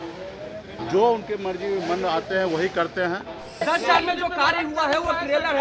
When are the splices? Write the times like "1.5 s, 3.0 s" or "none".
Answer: 3.6 s

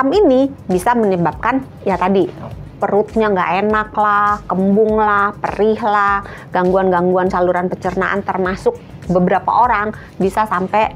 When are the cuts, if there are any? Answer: none

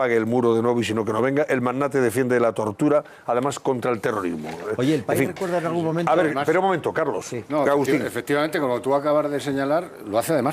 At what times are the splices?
5.2 s

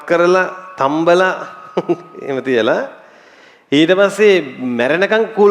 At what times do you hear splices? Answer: none

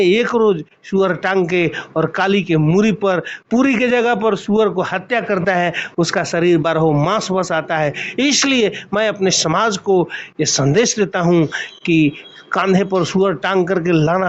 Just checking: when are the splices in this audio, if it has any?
none

